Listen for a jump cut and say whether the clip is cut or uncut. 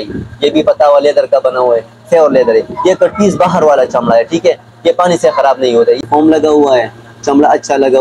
cut